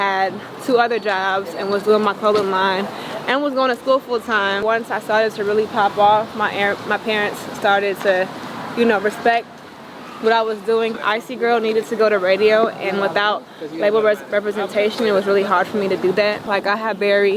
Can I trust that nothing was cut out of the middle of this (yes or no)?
no